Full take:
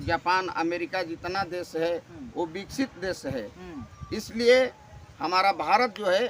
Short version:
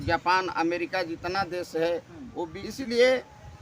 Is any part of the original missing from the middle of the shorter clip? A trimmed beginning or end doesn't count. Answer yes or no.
yes